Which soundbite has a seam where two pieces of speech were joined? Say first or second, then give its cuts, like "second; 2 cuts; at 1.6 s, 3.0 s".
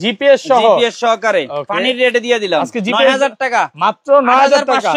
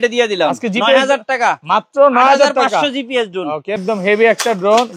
second; 1 cut; at 3.8 s